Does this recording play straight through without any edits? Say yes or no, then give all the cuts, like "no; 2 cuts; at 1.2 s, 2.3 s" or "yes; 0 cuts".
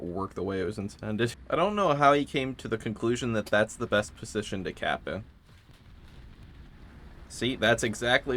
no; 2 cuts; at 1.4 s, 5.3 s